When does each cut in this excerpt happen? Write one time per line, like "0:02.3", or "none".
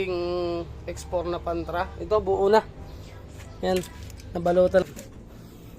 0:04.8